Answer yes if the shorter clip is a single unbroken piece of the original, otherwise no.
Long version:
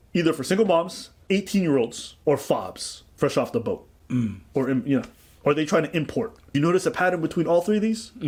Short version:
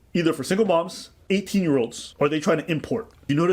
no